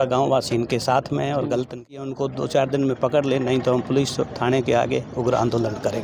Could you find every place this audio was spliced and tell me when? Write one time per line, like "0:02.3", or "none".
0:02.0